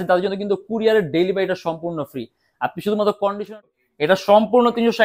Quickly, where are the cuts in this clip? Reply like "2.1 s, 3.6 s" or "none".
3.6 s